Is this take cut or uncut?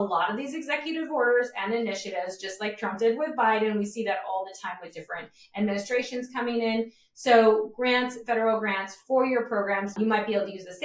cut